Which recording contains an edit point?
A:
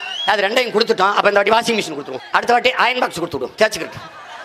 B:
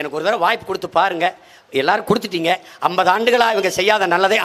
A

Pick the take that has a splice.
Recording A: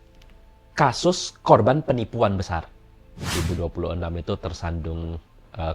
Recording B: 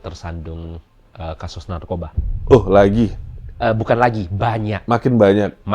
A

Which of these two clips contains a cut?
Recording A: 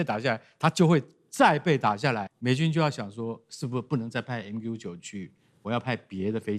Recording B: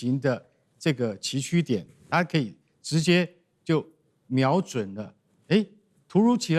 A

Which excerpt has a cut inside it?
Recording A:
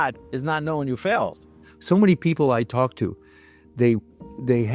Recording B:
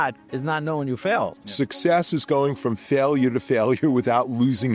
B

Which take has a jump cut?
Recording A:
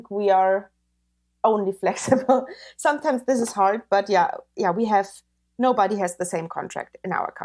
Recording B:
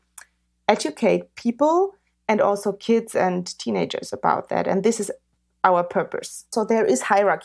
B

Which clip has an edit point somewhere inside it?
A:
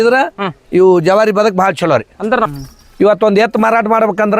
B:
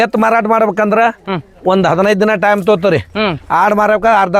A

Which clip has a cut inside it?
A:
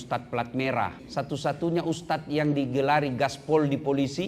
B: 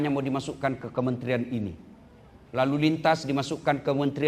A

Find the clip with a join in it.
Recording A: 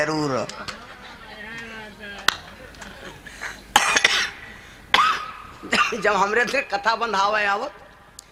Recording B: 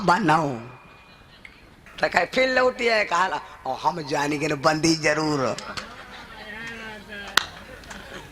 B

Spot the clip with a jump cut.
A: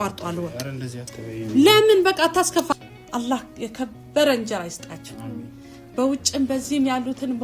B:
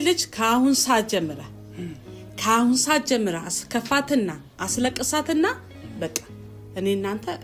A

